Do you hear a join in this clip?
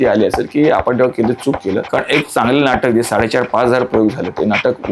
yes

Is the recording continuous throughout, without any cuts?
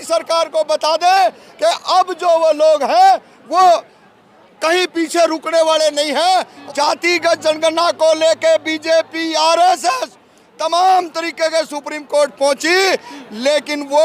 no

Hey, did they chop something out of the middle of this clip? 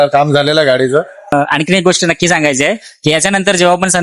yes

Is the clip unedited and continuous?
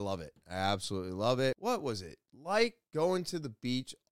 no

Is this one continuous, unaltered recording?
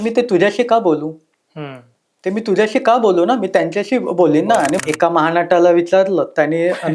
no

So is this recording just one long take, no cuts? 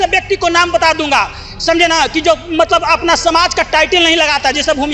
yes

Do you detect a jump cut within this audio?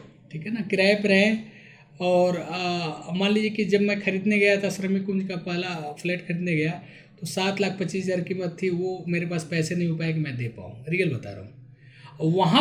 no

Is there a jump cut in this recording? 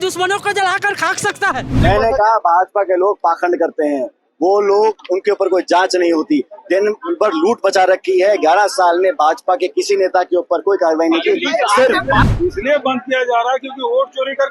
yes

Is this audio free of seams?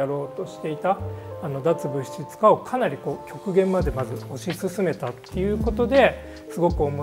yes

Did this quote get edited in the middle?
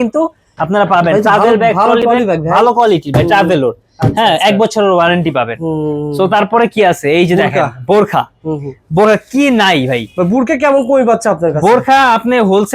no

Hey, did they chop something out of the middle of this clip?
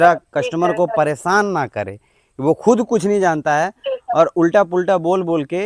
no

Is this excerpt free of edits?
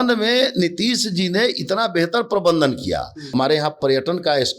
no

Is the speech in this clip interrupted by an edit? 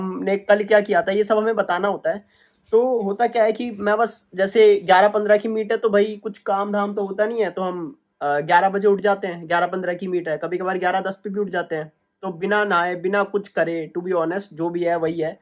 no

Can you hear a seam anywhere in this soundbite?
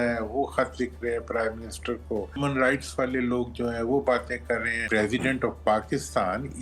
yes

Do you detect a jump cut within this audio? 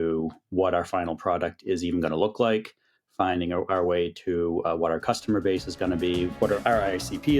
yes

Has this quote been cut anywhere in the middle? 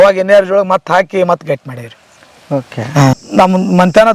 yes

